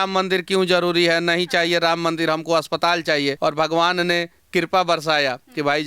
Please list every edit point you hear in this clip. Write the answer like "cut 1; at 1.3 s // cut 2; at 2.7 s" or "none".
cut 1; at 3.4 s